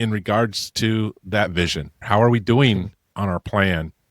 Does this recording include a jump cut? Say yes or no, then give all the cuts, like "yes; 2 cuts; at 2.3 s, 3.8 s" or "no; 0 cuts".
yes; 2 cuts; at 1.9 s, 3.1 s